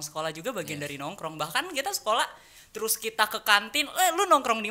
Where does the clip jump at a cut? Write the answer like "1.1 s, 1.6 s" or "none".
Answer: none